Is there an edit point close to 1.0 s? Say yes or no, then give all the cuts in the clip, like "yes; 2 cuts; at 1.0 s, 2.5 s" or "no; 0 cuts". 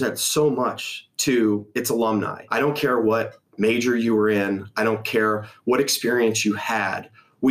no; 1 cut; at 2.4 s